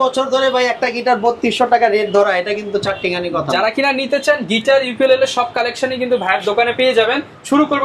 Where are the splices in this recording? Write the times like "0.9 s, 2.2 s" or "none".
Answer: none